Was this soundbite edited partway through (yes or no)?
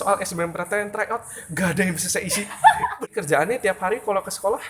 yes